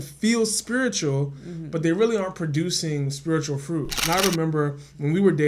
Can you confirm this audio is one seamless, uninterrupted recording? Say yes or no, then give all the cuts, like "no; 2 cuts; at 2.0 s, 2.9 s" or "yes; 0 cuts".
no; 1 cut; at 4.0 s